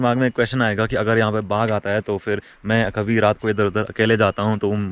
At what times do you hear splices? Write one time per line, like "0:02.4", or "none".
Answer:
none